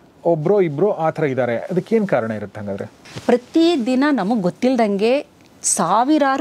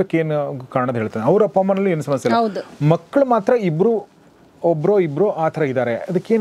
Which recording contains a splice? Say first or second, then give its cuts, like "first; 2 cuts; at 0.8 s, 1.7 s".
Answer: first; 1 cut; at 3.0 s